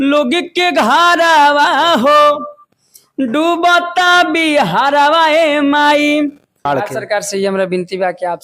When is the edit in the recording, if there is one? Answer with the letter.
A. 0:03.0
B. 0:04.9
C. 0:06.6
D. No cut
C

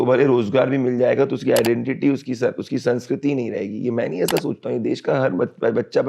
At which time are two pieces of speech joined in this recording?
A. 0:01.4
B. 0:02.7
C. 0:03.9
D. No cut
D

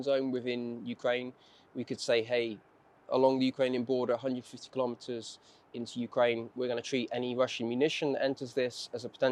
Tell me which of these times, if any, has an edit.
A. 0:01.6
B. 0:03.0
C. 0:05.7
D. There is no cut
D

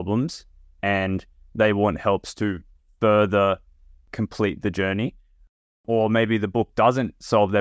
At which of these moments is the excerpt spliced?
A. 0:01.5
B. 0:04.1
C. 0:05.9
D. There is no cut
B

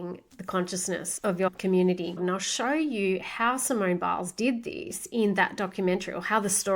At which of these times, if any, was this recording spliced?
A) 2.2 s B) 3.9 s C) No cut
A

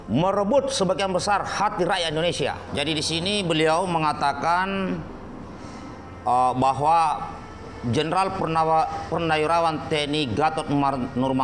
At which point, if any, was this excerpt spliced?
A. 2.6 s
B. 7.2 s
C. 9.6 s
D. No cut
A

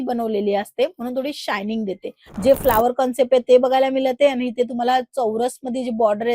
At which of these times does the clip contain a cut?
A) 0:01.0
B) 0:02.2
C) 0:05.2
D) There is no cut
B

